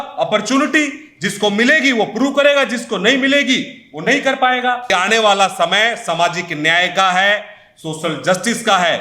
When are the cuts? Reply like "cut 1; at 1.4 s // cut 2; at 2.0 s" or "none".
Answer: cut 1; at 4.9 s